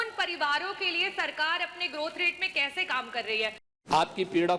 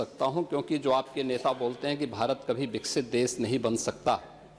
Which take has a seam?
first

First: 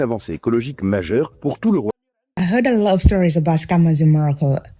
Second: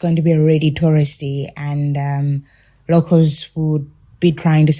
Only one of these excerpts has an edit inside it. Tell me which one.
first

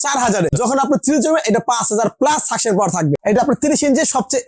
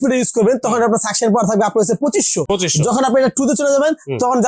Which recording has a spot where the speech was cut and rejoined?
first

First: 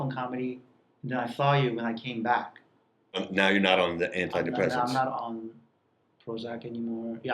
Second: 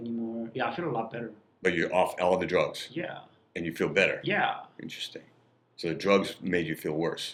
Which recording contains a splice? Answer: first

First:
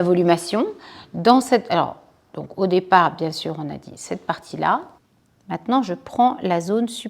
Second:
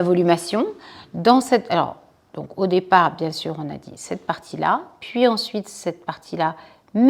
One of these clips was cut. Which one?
first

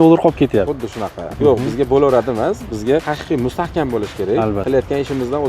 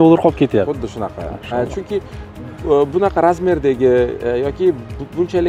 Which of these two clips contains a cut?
first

